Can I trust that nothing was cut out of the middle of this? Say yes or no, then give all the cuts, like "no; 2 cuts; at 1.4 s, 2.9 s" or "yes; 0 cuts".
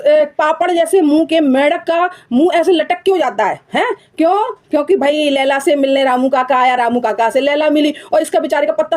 yes; 0 cuts